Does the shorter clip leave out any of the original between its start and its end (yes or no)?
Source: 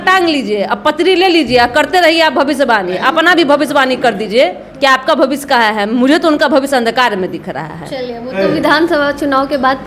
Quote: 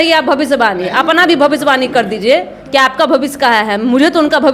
no